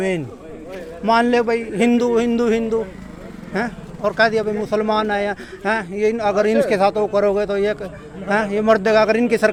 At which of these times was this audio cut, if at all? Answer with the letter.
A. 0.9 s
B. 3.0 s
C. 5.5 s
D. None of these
D